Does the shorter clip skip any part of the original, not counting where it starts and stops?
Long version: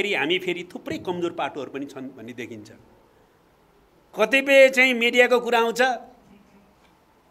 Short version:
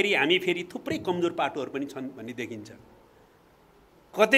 no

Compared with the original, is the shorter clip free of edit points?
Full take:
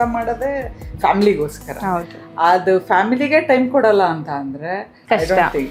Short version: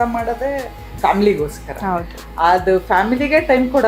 yes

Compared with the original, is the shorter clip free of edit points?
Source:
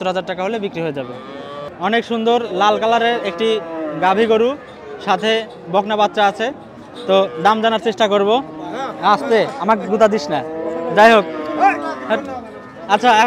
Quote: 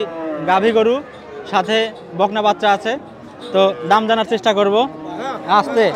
yes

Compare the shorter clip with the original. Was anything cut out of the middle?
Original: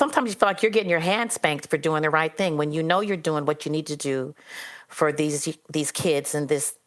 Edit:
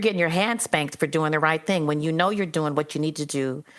no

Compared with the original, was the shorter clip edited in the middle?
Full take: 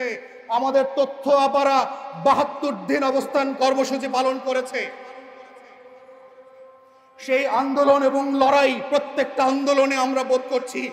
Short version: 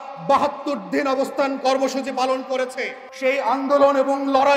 yes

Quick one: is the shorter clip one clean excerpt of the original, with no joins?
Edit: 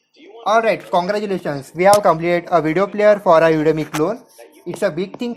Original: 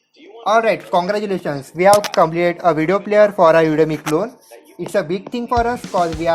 no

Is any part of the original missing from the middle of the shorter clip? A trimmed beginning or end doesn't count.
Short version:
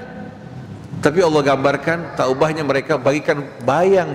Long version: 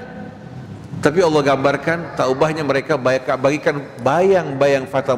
yes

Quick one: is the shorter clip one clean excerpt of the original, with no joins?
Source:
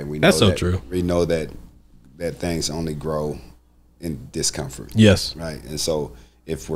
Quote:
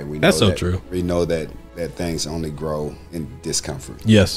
no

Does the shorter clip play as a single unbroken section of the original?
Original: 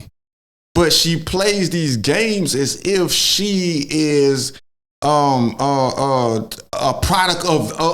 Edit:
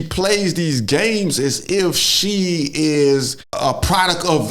no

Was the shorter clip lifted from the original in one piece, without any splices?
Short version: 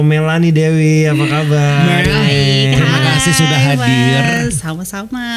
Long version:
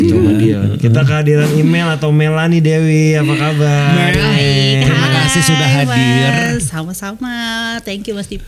yes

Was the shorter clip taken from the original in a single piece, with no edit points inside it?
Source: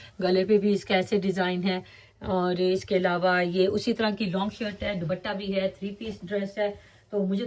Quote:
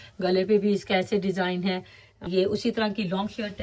no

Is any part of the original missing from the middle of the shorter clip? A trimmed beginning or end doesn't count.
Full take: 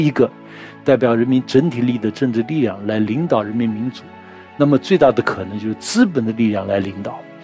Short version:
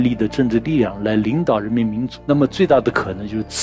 yes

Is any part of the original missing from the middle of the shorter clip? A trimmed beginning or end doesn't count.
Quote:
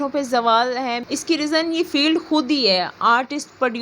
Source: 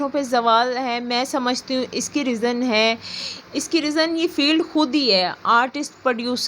yes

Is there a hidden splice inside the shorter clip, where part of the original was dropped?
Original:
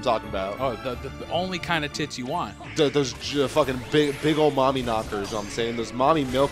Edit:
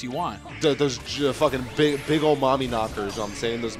no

